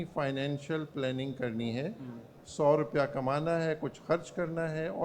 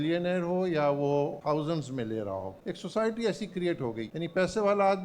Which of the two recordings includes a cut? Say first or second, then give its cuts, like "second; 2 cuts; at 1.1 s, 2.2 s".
second; 3 cuts; at 1.4 s, 2.6 s, 4.1 s